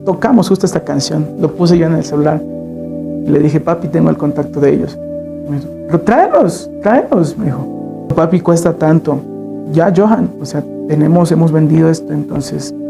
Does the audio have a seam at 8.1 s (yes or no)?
yes